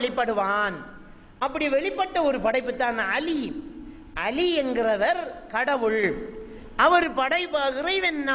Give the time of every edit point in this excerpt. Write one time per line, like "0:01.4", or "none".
none

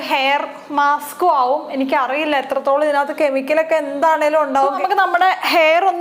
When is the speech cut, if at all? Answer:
0:04.7

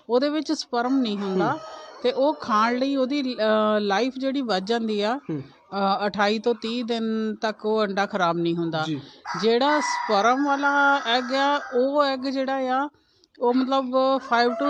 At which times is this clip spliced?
none

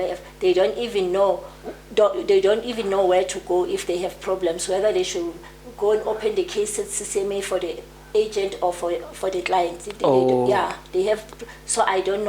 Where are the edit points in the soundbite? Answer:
none

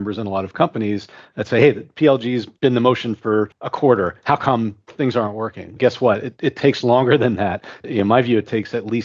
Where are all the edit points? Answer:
0:02.5
0:03.6

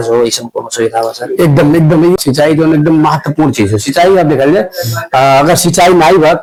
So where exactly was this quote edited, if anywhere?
none

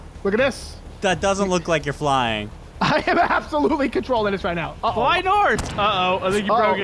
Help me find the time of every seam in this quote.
none

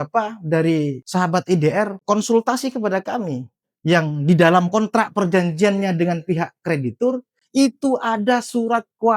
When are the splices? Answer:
0:01.0
0:02.0

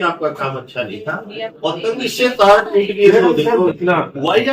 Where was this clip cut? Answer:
0:01.5
0:03.8

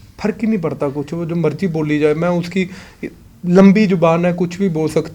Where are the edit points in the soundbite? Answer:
none

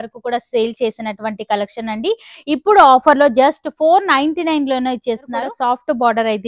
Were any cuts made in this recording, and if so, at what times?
0:05.5

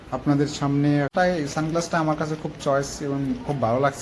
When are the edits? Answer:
0:01.1

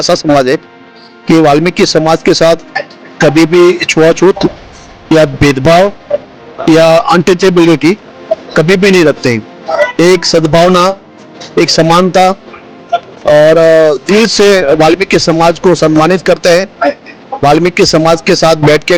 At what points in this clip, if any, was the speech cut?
none

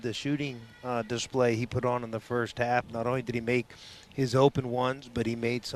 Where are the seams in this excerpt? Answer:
none

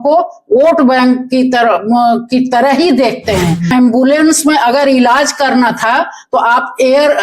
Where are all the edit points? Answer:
0:03.7

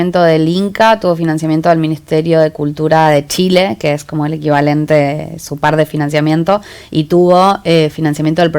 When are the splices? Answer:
none

